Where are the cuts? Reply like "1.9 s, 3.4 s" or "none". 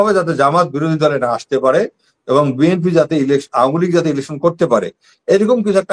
none